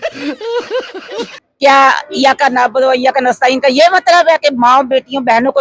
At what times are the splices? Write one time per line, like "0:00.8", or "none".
0:01.4